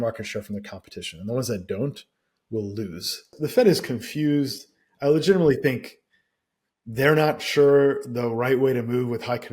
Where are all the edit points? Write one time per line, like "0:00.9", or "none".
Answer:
0:03.4